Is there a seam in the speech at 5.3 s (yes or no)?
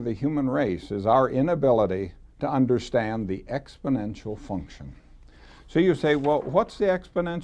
no